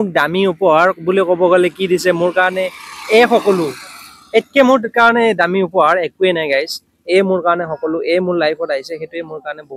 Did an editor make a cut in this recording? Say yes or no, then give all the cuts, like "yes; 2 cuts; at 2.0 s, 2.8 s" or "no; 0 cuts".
no; 0 cuts